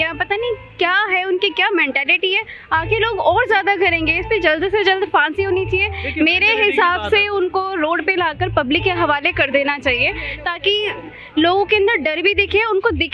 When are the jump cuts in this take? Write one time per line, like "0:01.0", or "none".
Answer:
none